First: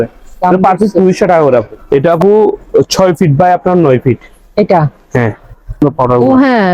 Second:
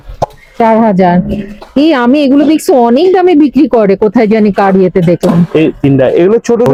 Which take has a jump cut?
first; 2 cuts; at 1.8 s, 5.8 s

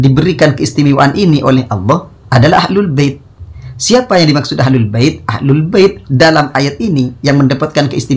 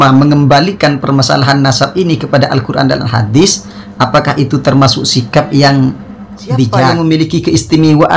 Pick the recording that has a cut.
second; 1 cut; at 6.8 s

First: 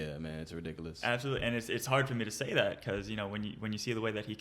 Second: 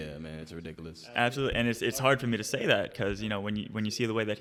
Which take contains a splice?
first; 1 cut; at 1.0 s

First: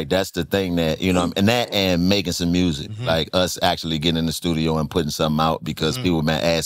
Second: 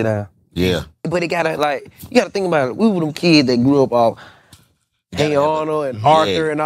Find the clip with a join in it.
second; 1 cut; at 1.0 s

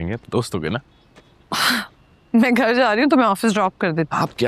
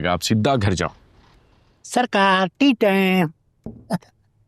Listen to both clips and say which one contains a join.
second; 1 cut; at 1.7 s

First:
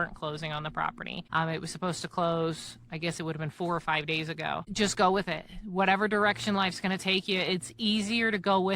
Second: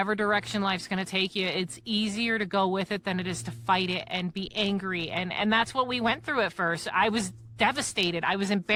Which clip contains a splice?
first; 2 cuts; at 1.2 s, 4.7 s

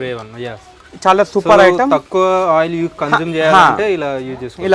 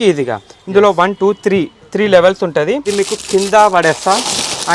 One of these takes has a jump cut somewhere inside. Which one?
second; 1 cut; at 2.9 s

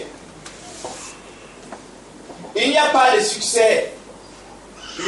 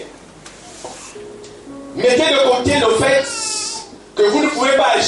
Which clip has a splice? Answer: second; 1 cut; at 1.2 s

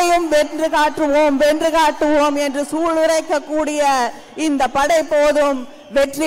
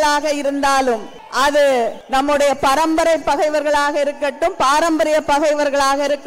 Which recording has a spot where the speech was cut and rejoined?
second; 2 cuts; at 1.2 s, 2.0 s

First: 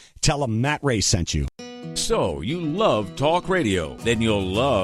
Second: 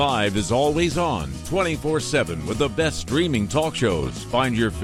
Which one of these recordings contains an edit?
first; 1 cut; at 1.5 s

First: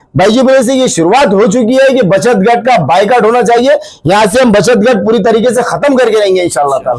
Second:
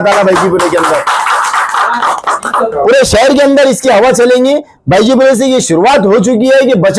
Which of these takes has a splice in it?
second; 1 cut; at 2.7 s

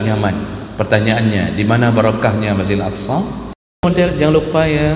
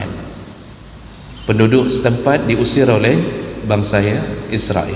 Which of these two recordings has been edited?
first; 1 cut; at 3.8 s

